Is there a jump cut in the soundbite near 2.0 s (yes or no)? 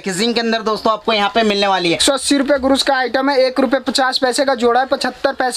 yes